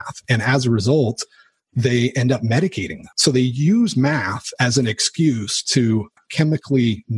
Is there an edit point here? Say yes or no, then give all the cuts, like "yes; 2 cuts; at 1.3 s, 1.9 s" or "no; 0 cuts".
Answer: yes; 1 cut; at 3.1 s